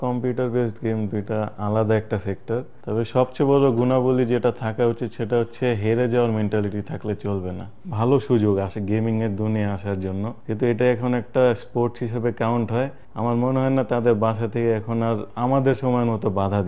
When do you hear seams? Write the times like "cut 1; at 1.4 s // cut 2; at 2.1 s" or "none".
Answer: cut 1; at 2.8 s // cut 2; at 7.8 s // cut 3; at 10.4 s // cut 4; at 13.0 s